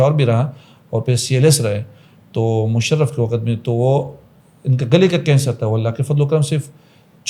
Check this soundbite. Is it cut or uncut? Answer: uncut